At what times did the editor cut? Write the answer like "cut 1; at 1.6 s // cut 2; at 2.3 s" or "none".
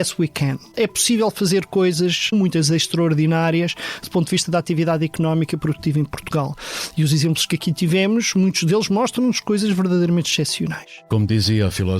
cut 1; at 0.7 s // cut 2; at 2.3 s // cut 3; at 11.1 s